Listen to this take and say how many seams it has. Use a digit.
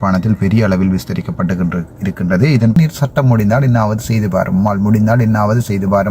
1